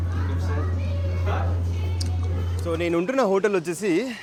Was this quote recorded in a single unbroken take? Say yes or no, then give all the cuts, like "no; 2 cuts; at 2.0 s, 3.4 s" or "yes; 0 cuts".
yes; 0 cuts